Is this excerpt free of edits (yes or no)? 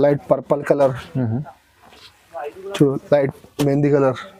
yes